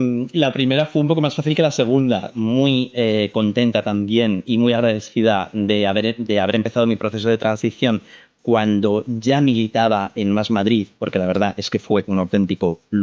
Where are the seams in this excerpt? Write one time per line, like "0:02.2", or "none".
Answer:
0:02.2